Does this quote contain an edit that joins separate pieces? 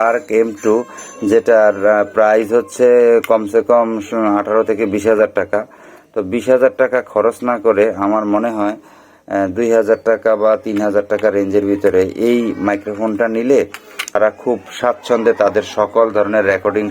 yes; 1 cut; at 14.1 s

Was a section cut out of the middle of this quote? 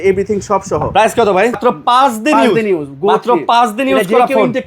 yes; 1 cut; at 1.5 s

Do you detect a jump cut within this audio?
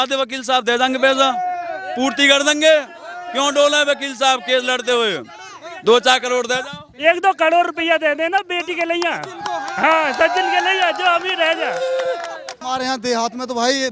yes; 1 cut; at 12.6 s

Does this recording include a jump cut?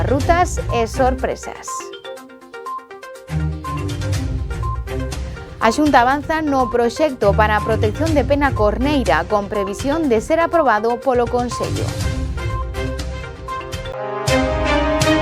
yes; 1 cut; at 13.9 s

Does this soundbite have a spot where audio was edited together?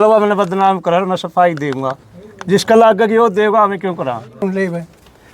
yes; 1 cut; at 4.4 s

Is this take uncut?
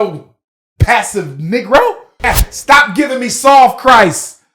no; 1 cut; at 2.1 s

